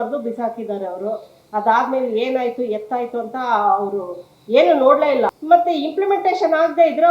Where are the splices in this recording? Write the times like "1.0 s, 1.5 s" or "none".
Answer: 5.4 s